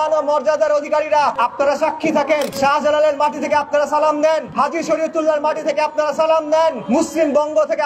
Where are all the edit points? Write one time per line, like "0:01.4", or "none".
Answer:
0:01.3
0:02.5
0:04.5
0:06.8